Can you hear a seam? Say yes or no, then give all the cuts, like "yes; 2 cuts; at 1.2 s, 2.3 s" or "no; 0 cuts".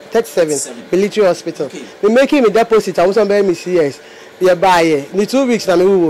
no; 0 cuts